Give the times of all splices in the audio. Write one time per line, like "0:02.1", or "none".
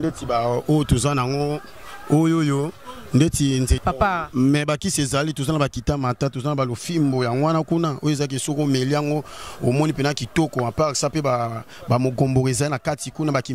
0:03.8